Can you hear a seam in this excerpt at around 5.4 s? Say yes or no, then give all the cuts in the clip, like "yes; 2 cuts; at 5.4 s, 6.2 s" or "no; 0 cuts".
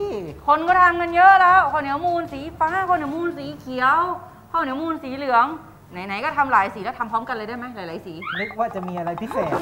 no; 0 cuts